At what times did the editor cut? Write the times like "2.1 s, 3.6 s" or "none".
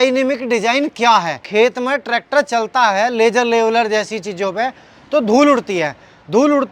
1.4 s